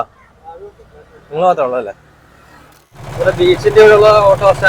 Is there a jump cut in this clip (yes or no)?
yes